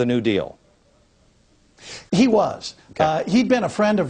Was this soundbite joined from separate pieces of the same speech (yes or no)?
no